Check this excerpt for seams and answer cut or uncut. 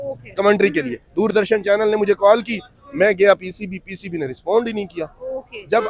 uncut